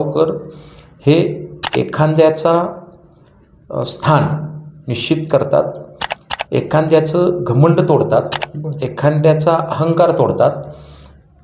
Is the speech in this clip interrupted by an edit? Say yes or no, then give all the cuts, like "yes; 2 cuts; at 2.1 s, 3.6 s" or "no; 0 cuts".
no; 0 cuts